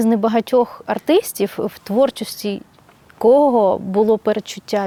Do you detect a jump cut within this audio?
no; 0 cuts

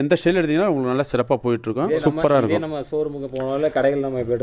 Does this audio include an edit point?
yes; 1 cut; at 1.9 s

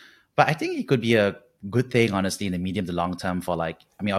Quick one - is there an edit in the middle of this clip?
no; 0 cuts

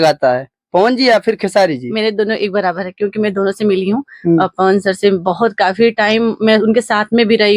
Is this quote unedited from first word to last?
yes; 0 cuts

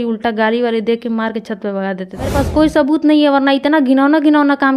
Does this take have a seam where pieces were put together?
yes; 1 cut; at 2.3 s

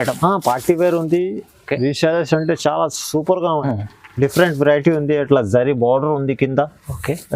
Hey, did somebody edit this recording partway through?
yes; 1 cut; at 3.6 s

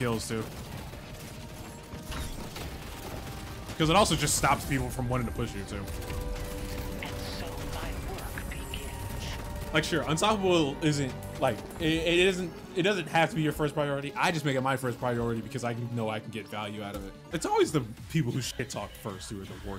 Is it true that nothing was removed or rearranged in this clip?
no; 1 cut; at 17.2 s

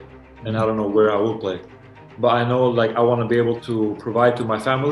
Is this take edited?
yes; 1 cut; at 3.6 s

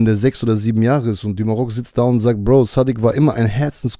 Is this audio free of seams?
yes; 0 cuts

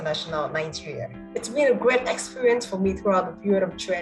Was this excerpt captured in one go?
no; 1 cut; at 1.2 s

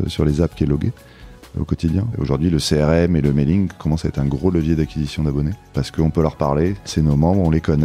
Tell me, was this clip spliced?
yes; 3 cuts; at 1.7 s, 5.6 s, 6.9 s

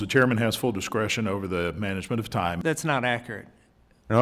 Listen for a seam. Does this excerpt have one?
yes; 1 cut; at 2.6 s

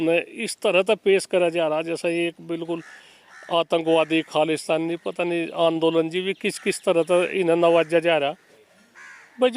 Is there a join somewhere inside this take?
yes; 1 cut; at 8.5 s

